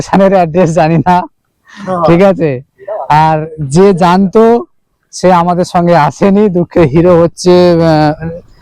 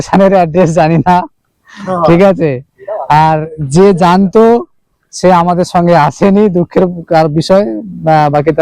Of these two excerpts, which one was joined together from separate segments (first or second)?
first